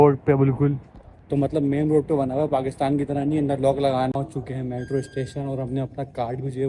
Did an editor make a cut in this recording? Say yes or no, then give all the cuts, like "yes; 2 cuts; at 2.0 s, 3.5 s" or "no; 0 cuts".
yes; 1 cut; at 4.2 s